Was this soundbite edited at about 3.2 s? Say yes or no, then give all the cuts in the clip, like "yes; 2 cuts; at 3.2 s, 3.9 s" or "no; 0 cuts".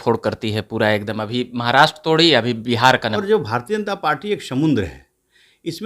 yes; 1 cut; at 3.2 s